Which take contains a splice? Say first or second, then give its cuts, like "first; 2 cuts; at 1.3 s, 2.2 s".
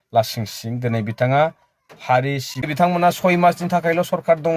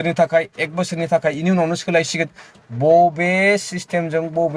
first; 1 cut; at 2.7 s